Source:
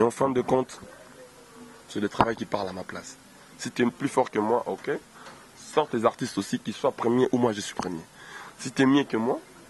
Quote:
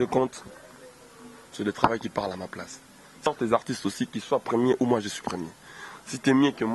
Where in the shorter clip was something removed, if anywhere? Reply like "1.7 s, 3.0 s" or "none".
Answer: 3.3 s

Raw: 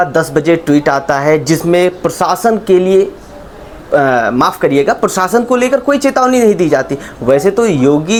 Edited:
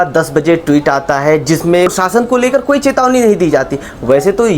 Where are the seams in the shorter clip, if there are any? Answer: 1.9 s

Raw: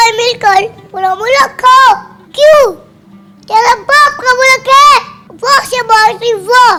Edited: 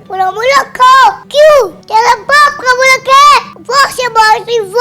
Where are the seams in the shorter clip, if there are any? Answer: 1.2 s, 1.8 s, 3.6 s

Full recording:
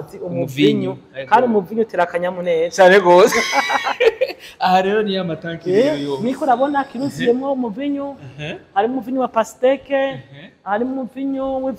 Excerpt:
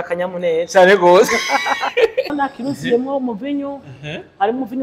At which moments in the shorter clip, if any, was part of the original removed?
2.3 s

